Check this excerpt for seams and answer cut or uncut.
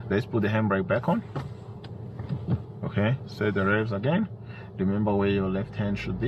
uncut